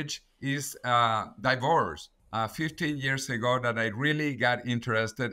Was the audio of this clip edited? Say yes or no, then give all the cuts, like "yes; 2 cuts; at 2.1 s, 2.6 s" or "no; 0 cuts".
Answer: yes; 1 cut; at 2.1 s